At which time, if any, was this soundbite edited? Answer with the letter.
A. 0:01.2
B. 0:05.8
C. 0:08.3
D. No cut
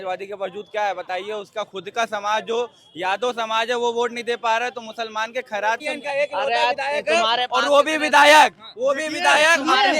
B